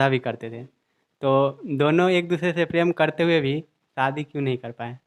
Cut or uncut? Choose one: uncut